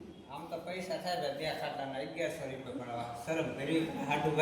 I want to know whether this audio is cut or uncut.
uncut